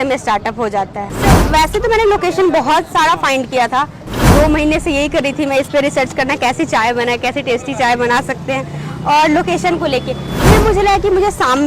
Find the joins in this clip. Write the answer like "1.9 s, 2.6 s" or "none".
1.1 s